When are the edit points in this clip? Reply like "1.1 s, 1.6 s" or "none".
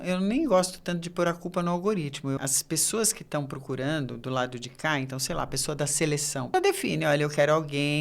2.4 s, 6.5 s